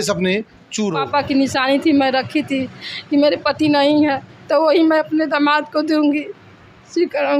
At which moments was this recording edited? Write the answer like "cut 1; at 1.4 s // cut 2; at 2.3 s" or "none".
cut 1; at 0.9 s